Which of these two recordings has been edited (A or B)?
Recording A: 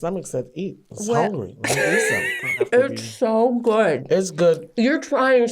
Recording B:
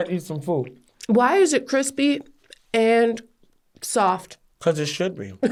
A